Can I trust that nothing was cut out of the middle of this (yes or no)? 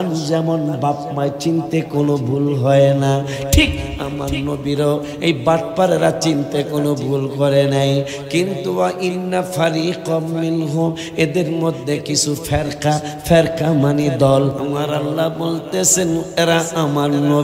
no